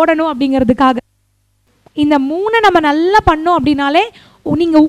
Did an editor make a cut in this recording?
yes; 1 cut; at 1.7 s

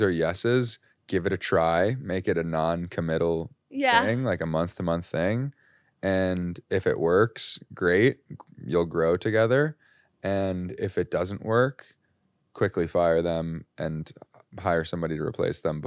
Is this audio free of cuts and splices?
yes; 0 cuts

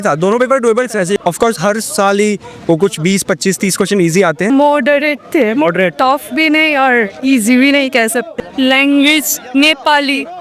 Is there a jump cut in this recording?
yes; 3 cuts; at 1.2 s, 4.5 s, 8.3 s

